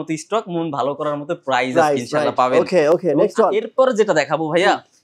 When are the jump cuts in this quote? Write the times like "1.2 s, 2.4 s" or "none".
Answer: none